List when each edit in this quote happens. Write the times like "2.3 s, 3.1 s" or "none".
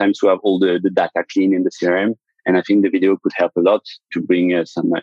4.1 s